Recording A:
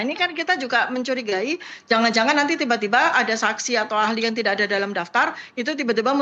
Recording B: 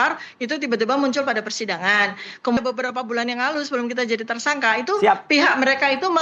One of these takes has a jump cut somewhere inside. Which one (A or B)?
B